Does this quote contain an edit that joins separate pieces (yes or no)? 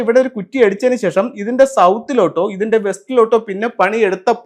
no